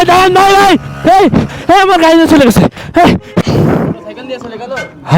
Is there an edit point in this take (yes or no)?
yes